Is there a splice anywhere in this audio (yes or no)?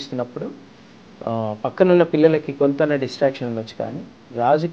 no